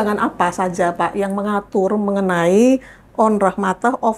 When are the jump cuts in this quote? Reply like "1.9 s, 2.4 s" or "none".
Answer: none